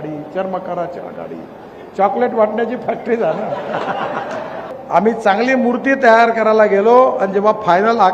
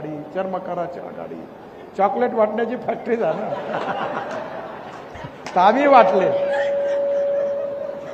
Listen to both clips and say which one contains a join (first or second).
first